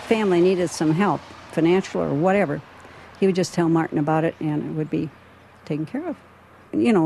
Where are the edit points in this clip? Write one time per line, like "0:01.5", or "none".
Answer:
none